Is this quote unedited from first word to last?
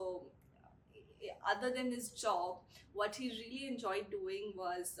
yes; 0 cuts

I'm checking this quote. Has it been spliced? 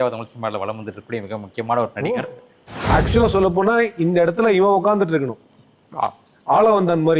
yes; 1 cut; at 2.8 s

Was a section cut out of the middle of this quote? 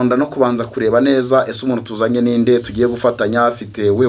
no; 0 cuts

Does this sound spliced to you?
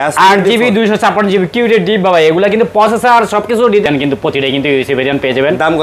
yes; 1 cut; at 3.9 s

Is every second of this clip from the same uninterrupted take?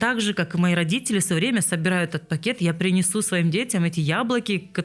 yes; 0 cuts

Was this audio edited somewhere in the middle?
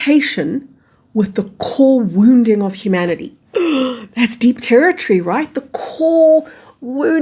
no; 0 cuts

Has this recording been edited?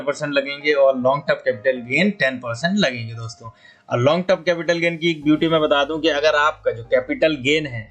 no; 0 cuts

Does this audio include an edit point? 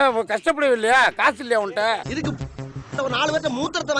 yes; 1 cut; at 2.1 s

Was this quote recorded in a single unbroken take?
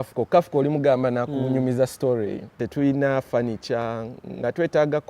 no; 1 cut; at 2.6 s

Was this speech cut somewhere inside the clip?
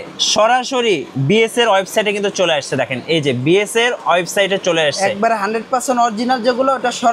no; 0 cuts

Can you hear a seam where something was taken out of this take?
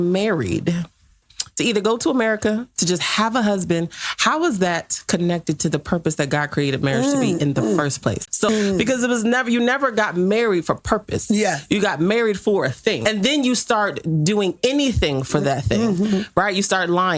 yes; 2 cuts; at 8.5 s, 13.0 s

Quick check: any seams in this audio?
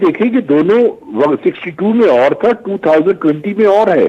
no; 0 cuts

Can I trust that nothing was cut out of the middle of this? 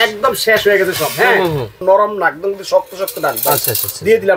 no; 1 cut; at 1.8 s

